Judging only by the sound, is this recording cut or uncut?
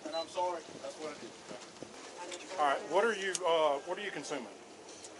uncut